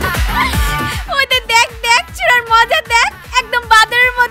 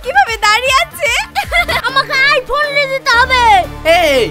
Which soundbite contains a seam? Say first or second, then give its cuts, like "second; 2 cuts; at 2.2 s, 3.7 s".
second; 1 cut; at 1.8 s